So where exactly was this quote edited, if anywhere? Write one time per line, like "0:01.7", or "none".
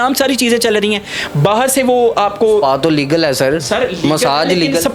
none